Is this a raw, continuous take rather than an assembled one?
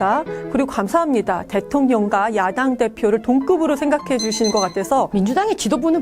no; 1 cut; at 5.1 s

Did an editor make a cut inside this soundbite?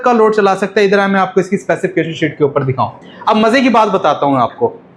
yes; 1 cut; at 3.0 s

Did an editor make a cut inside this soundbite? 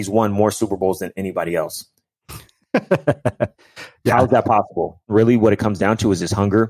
yes; 1 cut; at 5.1 s

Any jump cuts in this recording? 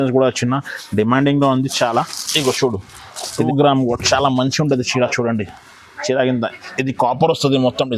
yes; 1 cut; at 3.3 s

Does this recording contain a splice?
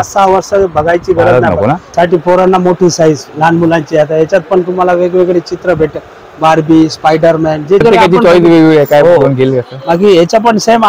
yes; 2 cuts; at 1.8 s, 7.8 s

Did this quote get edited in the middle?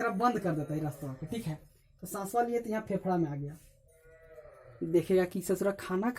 no; 0 cuts

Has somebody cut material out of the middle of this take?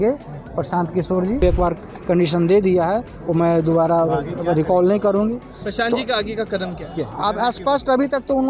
yes; 1 cut; at 1.4 s

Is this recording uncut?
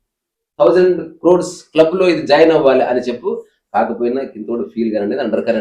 yes; 0 cuts

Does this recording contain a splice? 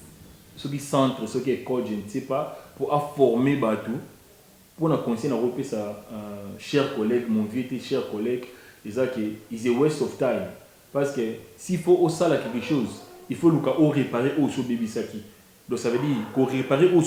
no; 0 cuts

